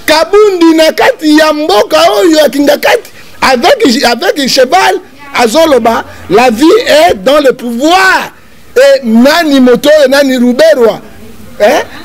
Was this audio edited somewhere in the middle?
no; 0 cuts

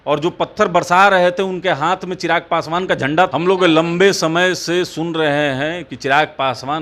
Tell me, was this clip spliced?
yes; 1 cut; at 3.3 s

